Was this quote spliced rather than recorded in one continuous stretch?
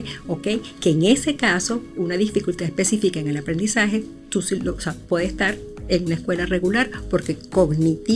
no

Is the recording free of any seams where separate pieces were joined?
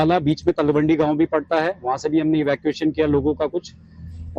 yes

